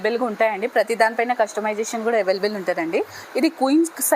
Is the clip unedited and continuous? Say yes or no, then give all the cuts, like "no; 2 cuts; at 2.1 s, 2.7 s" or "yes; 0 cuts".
no; 1 cut; at 3.2 s